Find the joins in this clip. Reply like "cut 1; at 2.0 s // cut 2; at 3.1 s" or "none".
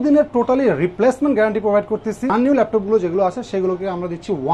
cut 1; at 2.3 s